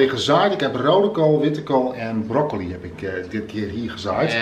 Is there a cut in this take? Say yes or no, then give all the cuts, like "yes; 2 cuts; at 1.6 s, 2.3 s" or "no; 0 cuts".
no; 0 cuts